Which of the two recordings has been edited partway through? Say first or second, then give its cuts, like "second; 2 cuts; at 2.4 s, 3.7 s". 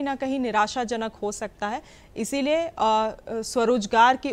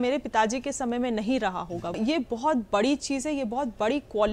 second; 1 cut; at 2.0 s